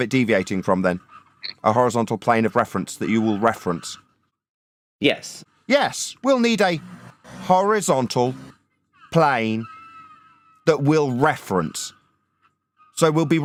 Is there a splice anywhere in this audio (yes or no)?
no